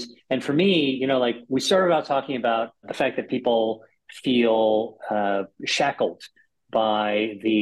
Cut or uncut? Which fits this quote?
cut